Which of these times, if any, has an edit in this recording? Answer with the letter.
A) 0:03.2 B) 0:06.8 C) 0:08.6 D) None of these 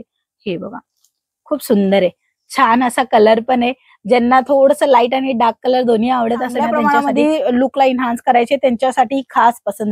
B